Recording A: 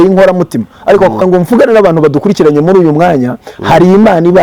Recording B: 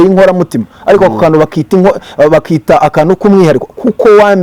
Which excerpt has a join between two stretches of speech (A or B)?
A